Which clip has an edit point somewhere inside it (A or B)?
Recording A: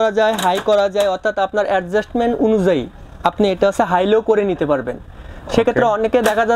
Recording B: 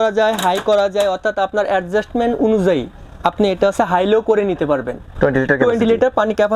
B